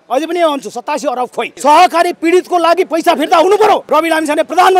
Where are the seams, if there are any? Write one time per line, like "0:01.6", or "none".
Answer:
0:01.5
0:03.8